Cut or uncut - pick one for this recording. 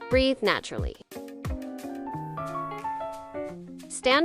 cut